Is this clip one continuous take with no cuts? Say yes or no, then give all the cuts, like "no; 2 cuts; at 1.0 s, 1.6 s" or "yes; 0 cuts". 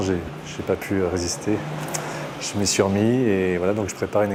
yes; 0 cuts